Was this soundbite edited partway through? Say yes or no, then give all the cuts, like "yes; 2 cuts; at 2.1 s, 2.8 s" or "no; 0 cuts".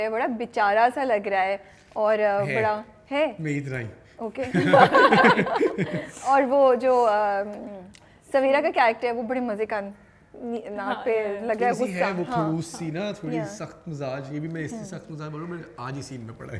no; 0 cuts